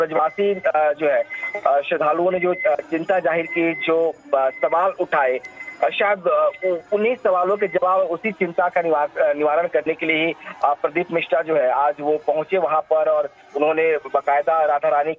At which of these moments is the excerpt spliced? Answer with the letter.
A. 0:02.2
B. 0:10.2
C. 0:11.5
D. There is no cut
B